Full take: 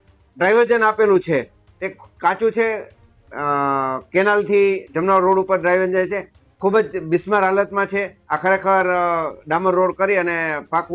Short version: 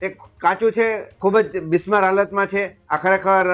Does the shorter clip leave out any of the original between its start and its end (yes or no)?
yes